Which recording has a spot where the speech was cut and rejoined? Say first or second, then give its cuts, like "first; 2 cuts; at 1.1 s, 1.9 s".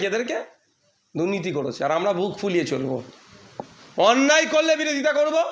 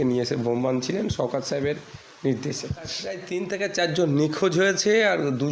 second; 1 cut; at 3.2 s